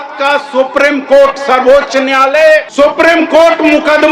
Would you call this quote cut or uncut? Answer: cut